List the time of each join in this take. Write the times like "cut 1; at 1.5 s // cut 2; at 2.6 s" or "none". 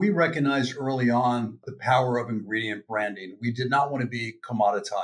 cut 1; at 1.6 s